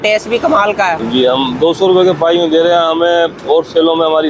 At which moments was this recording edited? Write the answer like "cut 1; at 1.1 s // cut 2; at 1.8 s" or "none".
cut 1; at 1.0 s